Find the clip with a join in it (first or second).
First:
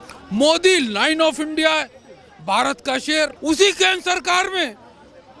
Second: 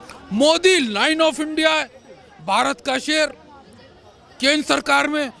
first